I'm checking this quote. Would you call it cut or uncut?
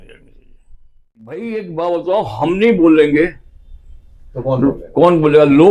cut